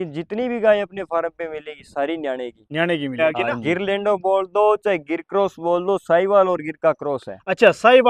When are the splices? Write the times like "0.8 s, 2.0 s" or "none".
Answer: 3.1 s